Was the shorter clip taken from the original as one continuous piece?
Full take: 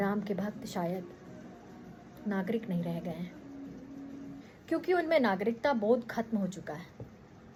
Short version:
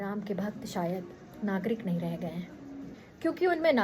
no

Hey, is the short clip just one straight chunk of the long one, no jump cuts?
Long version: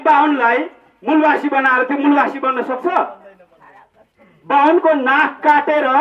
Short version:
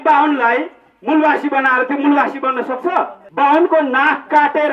no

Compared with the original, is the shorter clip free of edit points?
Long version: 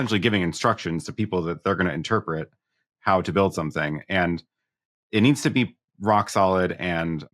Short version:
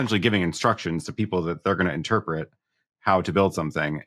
yes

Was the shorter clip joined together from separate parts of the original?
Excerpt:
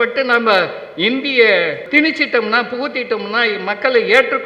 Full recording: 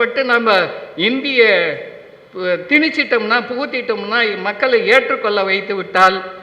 yes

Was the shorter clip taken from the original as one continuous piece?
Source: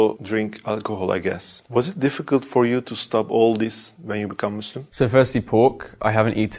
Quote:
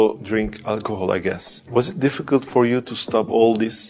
yes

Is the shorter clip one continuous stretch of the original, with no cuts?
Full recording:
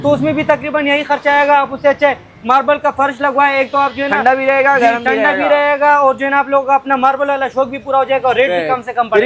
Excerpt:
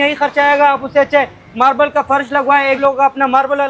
no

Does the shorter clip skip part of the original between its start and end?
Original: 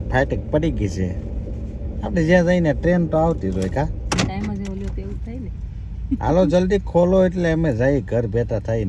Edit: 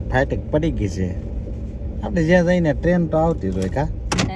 no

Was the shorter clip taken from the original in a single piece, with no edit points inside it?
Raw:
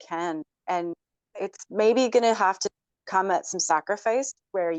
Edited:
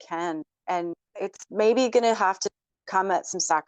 no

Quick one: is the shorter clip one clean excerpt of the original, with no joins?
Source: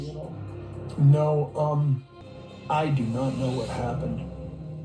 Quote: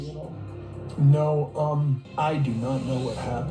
no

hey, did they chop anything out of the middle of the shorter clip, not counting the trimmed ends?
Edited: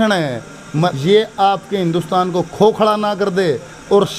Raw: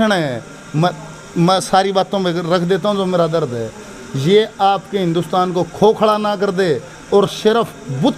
yes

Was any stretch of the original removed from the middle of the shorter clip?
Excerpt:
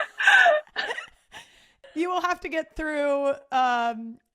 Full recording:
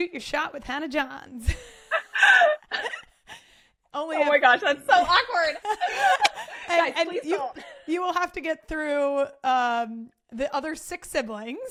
yes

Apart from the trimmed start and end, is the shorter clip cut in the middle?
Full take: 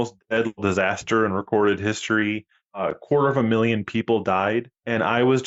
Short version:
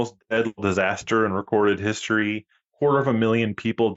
yes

